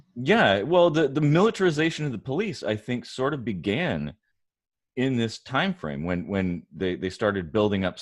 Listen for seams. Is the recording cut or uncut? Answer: uncut